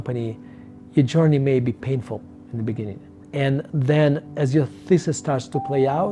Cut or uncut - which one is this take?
uncut